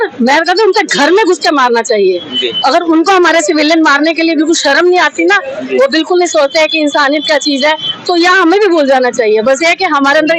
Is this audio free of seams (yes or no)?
yes